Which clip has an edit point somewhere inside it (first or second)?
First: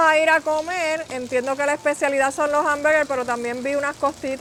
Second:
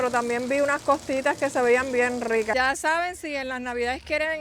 second